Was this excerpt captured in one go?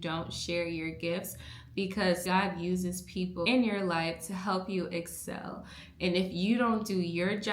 no; 1 cut; at 2.2 s

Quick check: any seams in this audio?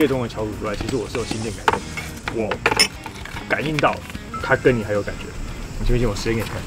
no; 0 cuts

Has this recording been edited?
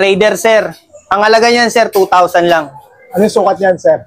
no; 0 cuts

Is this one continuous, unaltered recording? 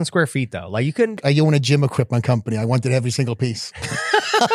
no; 1 cut; at 1.2 s

